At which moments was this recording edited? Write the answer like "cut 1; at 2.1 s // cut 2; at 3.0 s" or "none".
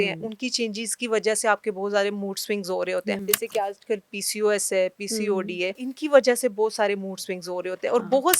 cut 1; at 3.2 s // cut 2; at 5.8 s